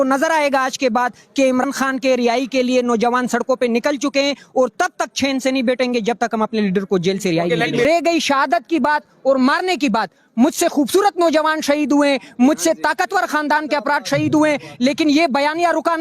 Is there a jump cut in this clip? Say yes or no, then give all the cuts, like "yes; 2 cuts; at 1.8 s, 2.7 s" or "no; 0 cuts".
yes; 2 cuts; at 1.6 s, 7.8 s